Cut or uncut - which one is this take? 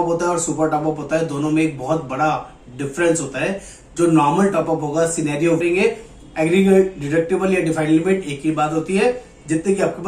cut